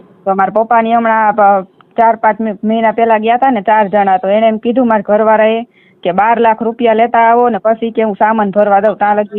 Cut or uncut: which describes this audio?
uncut